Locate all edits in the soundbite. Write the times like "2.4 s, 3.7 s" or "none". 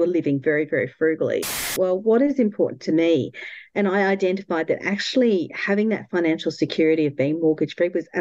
1.7 s